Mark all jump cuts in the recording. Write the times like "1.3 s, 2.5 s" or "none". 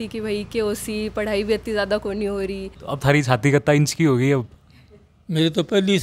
2.7 s